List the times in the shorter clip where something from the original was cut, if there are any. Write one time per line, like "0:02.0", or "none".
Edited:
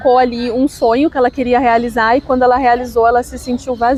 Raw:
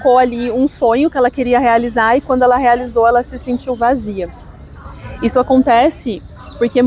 none